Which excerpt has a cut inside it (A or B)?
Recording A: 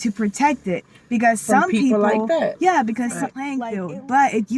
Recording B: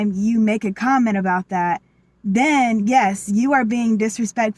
A